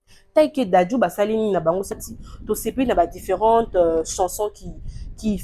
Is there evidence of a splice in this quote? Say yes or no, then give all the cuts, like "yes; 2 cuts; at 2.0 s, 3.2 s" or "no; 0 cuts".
yes; 1 cut; at 2.0 s